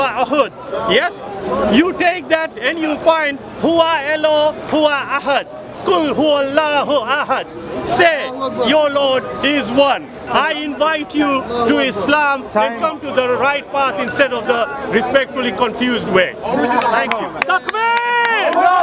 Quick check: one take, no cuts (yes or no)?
yes